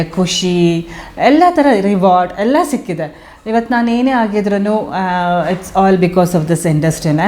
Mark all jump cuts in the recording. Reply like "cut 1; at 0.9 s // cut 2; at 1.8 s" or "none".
none